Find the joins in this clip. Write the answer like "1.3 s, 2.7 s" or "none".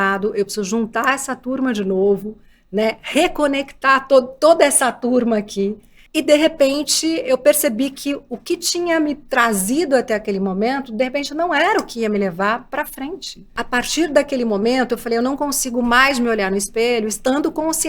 13.6 s